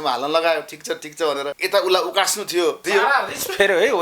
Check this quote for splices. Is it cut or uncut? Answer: cut